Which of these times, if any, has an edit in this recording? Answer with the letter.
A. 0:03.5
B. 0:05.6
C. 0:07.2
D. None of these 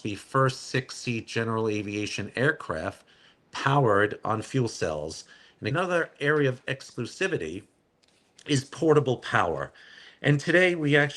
B